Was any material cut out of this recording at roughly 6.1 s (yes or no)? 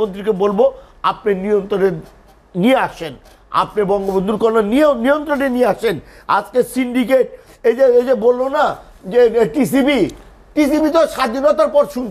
no